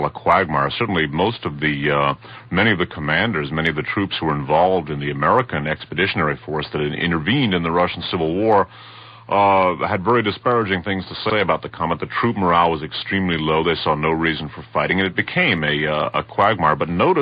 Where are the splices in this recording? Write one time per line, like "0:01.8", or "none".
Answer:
0:15.1